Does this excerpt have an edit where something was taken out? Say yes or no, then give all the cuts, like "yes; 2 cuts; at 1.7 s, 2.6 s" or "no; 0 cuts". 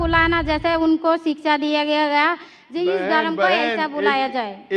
no; 0 cuts